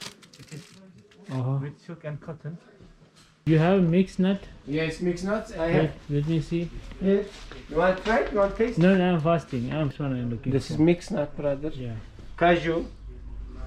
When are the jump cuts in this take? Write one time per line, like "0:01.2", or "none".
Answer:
0:03.4
0:09.9